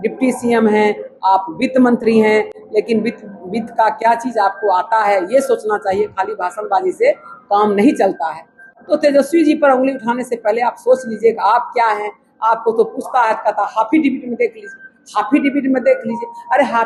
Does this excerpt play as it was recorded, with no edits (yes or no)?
yes